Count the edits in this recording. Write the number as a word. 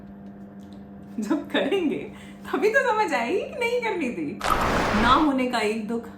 one